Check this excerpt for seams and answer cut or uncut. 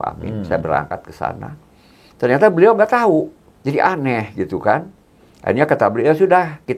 cut